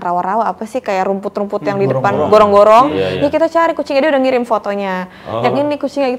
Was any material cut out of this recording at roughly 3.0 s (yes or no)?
no